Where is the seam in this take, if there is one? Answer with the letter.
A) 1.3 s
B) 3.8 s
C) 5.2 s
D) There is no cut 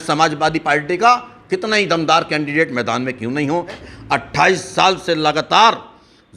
B